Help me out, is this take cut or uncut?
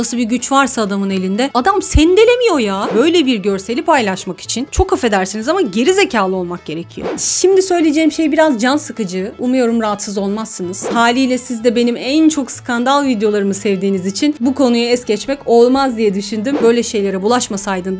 cut